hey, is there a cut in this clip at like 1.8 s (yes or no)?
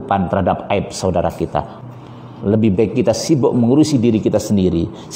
yes